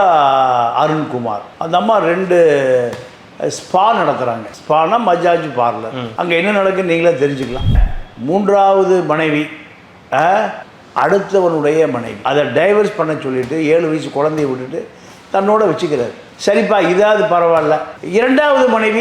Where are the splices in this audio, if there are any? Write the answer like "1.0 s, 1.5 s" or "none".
7.8 s